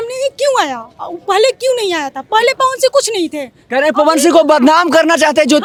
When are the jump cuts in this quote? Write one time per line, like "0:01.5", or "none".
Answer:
none